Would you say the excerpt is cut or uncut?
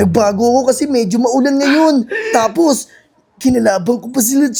uncut